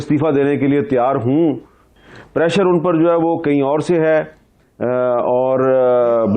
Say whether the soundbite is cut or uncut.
cut